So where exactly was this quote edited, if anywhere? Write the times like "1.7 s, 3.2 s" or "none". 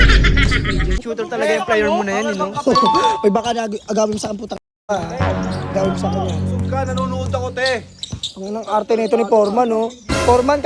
1.0 s

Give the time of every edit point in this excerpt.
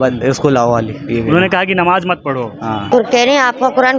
2.8 s

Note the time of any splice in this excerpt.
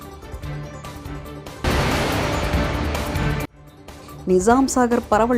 1.0 s

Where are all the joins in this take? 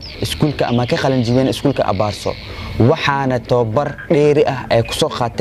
none

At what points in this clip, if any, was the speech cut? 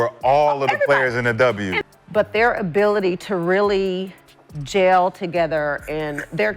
none

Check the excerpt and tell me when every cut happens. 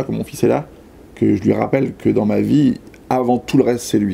none

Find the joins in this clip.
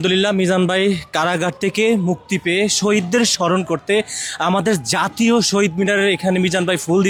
none

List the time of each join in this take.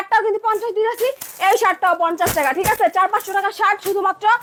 none

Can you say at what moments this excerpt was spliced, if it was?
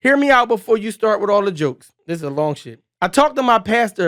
none

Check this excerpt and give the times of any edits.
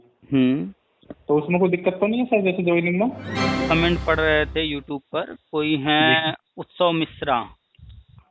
3.6 s

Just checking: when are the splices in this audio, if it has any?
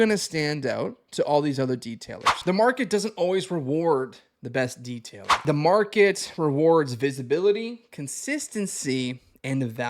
2.3 s, 5.4 s

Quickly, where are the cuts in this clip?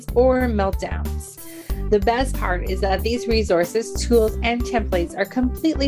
none

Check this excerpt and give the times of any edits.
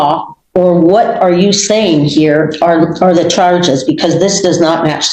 none

